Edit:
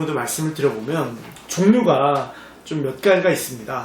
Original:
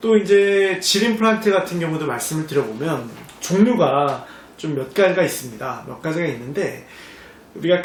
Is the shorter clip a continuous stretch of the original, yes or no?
yes